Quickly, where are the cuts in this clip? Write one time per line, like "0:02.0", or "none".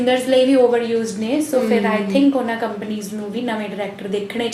none

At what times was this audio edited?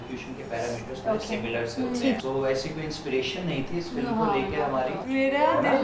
0:02.2
0:05.0

